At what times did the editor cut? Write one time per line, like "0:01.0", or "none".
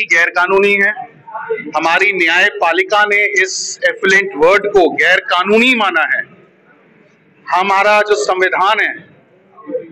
none